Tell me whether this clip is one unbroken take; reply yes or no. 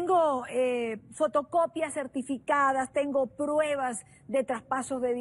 yes